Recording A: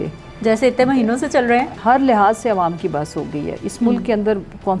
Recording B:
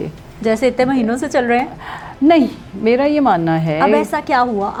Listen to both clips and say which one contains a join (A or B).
A